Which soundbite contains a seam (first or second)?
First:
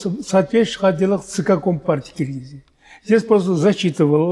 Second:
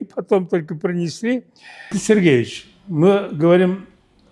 second